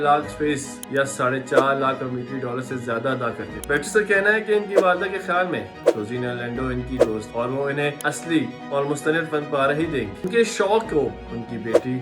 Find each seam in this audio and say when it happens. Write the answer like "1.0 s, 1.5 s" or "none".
3.6 s, 10.3 s